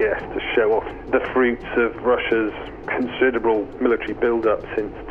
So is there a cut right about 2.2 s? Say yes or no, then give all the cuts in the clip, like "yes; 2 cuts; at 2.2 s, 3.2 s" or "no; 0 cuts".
no; 2 cuts; at 0.9 s, 3.7 s